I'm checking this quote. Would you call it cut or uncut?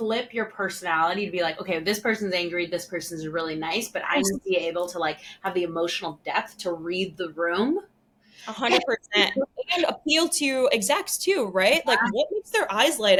uncut